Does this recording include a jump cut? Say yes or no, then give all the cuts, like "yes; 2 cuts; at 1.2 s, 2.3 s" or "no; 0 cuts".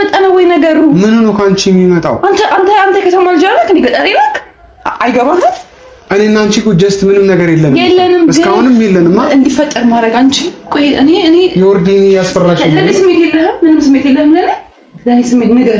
no; 0 cuts